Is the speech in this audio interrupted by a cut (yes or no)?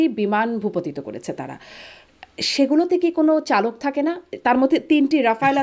no